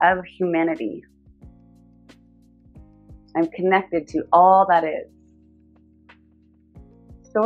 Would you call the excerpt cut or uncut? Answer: uncut